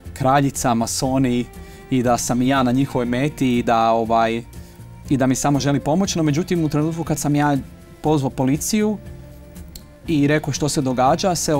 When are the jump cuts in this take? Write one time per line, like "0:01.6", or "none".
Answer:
none